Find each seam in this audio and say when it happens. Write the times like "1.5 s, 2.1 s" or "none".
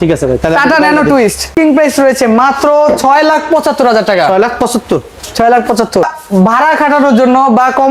1.5 s